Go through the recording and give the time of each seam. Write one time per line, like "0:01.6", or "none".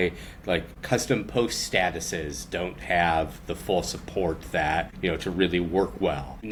none